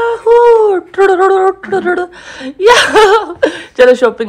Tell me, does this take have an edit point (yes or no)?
no